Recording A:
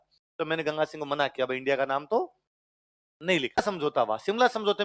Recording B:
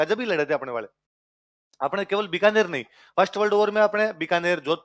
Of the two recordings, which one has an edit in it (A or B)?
A